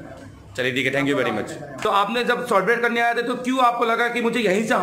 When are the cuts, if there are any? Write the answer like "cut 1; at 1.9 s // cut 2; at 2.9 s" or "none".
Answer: cut 1; at 1.7 s